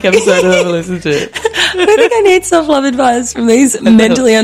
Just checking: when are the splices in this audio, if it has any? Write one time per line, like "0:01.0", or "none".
none